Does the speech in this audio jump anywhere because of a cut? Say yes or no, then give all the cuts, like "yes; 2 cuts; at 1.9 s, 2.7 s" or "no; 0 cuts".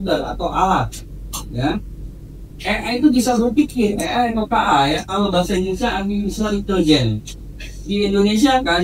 no; 0 cuts